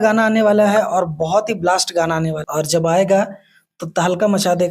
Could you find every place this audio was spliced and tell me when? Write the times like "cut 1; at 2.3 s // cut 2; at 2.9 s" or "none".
cut 1; at 2.4 s